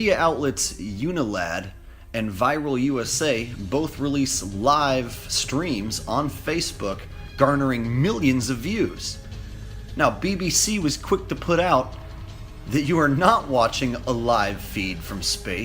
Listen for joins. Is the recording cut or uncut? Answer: cut